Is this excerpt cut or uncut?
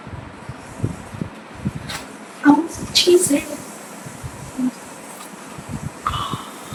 uncut